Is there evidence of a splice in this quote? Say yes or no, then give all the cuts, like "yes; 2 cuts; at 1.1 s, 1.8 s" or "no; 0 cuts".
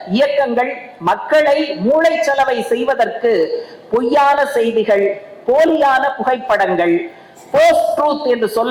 no; 0 cuts